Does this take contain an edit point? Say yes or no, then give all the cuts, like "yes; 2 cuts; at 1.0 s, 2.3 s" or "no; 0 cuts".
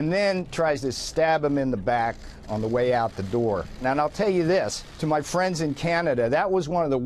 yes; 2 cuts; at 3.8 s, 4.8 s